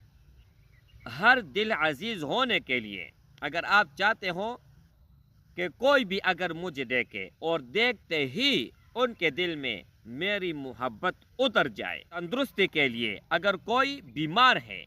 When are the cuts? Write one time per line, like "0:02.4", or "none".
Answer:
0:12.2

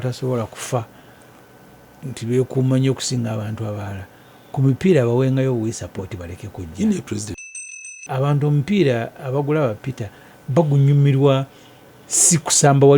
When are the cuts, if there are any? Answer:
0:07.3

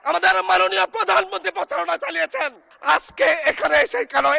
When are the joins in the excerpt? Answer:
0:02.7

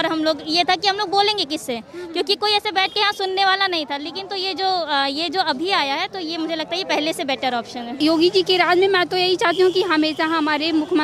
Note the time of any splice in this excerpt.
0:08.0

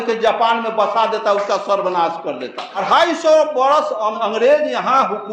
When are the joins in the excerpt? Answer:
0:02.8
0:04.1

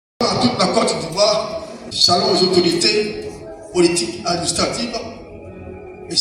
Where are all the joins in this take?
none

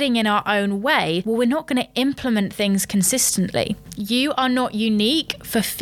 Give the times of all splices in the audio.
0:03.8

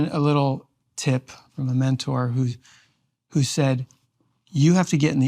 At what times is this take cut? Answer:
0:01.5

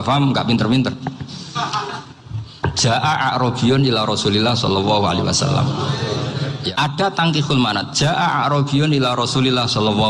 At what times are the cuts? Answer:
0:06.7

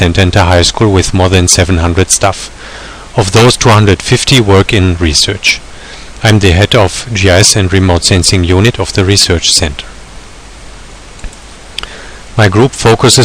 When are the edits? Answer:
0:06.3

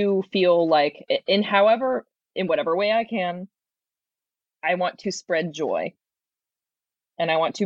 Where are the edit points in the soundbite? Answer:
none

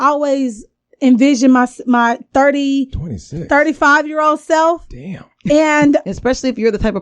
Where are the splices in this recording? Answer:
0:06.1

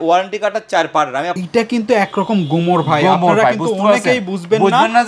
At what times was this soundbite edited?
0:01.4

